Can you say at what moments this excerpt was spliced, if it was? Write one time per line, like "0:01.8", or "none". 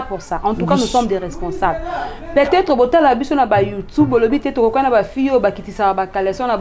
none